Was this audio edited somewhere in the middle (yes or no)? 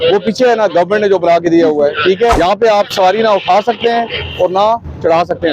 yes